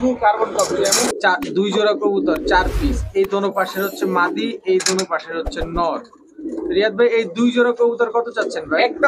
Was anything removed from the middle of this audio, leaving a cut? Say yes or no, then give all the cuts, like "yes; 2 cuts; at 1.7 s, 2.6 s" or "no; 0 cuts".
yes; 1 cut; at 1.1 s